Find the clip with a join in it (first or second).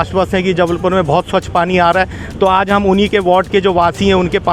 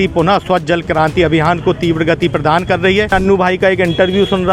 second